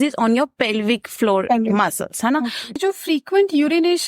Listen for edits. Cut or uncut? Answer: cut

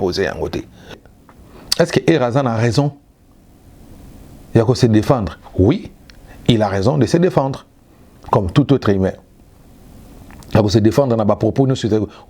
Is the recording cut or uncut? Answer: cut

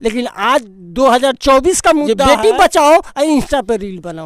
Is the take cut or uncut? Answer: cut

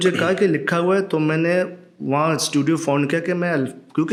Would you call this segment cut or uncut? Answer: uncut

